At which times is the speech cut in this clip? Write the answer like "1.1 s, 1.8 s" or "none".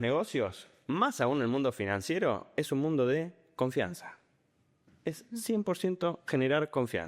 none